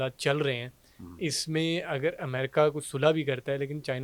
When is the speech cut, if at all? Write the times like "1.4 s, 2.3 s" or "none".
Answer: none